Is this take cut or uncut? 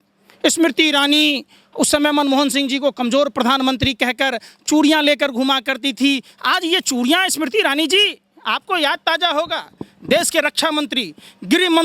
uncut